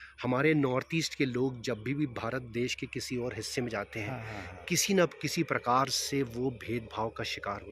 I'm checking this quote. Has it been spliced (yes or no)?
no